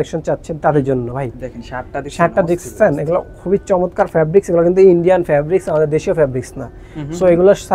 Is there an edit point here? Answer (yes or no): no